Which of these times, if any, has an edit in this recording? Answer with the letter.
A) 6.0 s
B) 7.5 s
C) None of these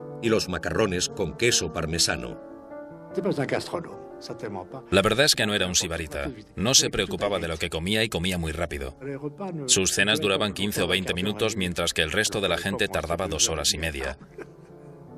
A